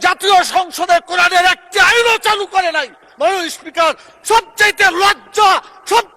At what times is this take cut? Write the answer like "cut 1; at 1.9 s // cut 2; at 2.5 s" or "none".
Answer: none